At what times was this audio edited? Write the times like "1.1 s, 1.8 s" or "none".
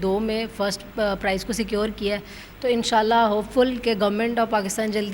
none